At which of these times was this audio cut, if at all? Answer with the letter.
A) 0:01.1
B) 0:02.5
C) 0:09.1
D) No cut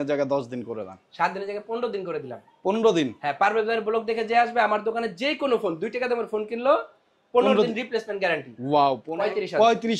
C